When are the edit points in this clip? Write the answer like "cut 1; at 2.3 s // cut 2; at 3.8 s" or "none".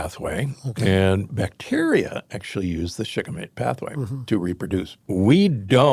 cut 1; at 5.0 s

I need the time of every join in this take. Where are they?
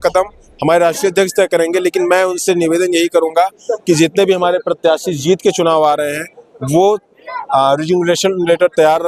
none

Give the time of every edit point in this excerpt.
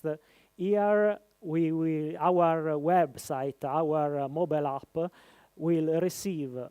none

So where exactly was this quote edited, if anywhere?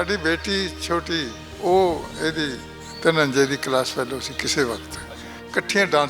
cut 1; at 1.4 s

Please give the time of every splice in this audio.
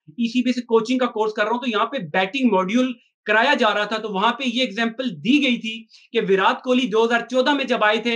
none

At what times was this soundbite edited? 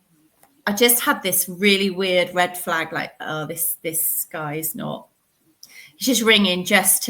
none

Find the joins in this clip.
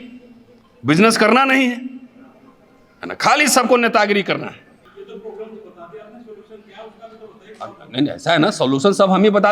cut 1; at 4.8 s

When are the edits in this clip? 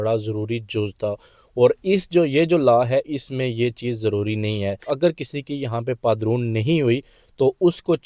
cut 1; at 4.9 s

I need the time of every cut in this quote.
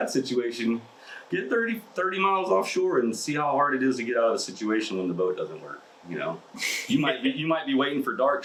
none

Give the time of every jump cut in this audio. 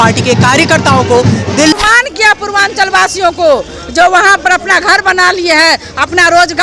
cut 1; at 1.7 s

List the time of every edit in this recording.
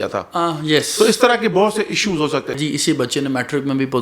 cut 1; at 2.6 s

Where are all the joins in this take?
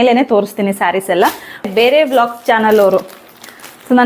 cut 1; at 1.7 s

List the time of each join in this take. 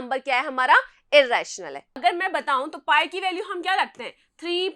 cut 1; at 1.8 s

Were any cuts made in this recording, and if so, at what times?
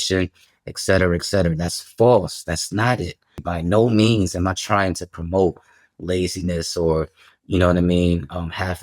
cut 1; at 3.4 s

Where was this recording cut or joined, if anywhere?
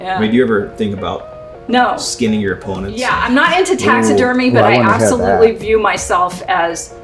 cut 1; at 3.0 s

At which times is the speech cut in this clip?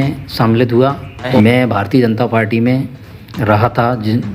cut 1; at 1.2 s

